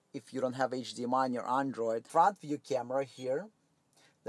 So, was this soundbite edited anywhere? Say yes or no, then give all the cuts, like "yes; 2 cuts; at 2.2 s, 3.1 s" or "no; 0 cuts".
yes; 1 cut; at 2.1 s